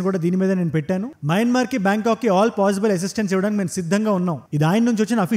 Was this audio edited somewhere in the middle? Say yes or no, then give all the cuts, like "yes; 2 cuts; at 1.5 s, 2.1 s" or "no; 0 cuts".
no; 0 cuts